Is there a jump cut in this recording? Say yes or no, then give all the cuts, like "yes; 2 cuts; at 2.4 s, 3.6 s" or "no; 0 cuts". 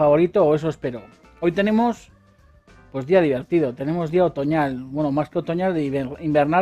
no; 0 cuts